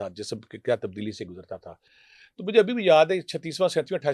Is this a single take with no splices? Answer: yes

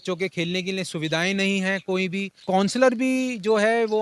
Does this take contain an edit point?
yes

